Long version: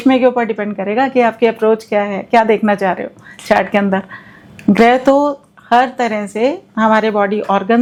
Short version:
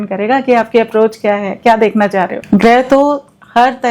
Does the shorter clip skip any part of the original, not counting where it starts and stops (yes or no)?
yes